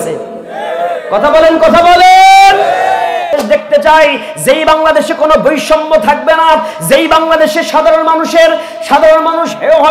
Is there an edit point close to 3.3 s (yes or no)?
yes